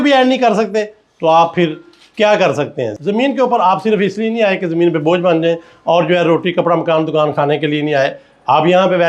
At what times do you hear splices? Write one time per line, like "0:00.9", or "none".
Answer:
0:02.9